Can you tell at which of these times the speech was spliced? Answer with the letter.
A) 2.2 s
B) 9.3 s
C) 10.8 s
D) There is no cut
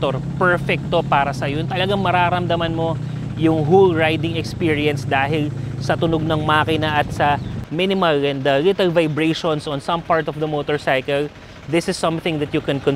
D